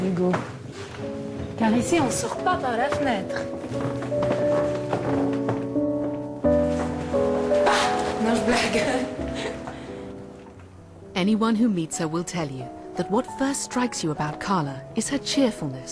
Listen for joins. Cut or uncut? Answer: uncut